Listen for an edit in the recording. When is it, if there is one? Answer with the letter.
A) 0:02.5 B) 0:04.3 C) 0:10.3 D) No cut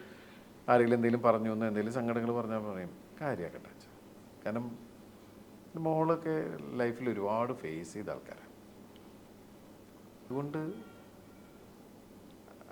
C